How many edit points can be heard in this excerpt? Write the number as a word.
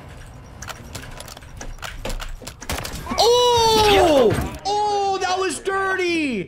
one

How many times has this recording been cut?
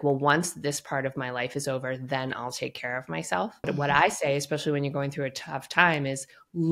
one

